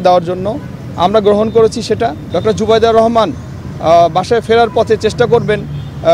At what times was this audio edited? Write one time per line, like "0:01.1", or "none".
0:02.2